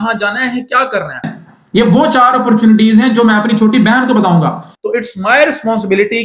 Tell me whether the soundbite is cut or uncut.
cut